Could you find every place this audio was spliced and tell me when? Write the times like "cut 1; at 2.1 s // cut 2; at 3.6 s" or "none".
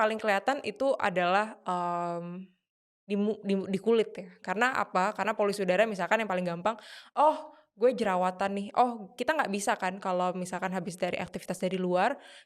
none